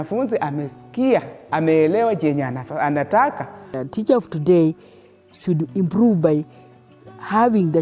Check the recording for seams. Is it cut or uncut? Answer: cut